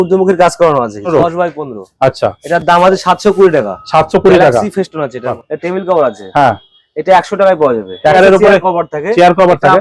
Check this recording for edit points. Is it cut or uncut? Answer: cut